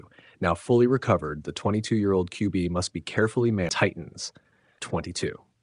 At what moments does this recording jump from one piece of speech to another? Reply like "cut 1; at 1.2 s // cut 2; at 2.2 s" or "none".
cut 1; at 3.7 s